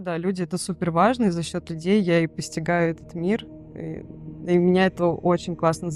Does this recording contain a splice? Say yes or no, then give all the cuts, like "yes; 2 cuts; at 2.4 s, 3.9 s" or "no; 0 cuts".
no; 0 cuts